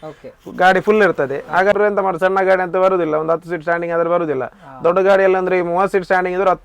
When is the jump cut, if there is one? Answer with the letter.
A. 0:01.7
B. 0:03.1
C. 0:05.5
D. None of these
A